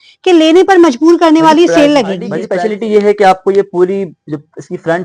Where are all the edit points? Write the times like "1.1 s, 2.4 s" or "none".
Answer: 2.4 s